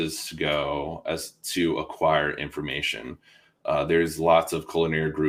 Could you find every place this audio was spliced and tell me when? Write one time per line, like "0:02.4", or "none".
none